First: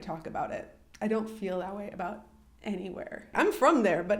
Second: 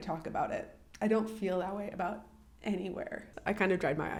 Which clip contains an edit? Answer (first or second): first